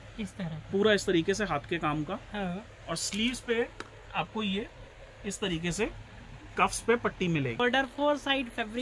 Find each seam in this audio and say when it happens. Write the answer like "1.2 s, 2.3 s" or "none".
7.6 s